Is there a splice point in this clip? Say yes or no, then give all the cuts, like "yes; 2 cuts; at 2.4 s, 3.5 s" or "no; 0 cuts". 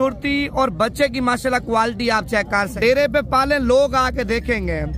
yes; 1 cut; at 2.7 s